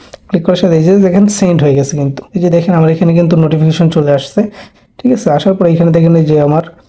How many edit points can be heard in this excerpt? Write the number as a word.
two